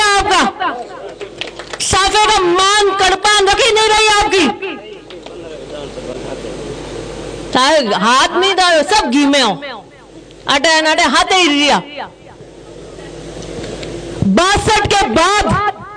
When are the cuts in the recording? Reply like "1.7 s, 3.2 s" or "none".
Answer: none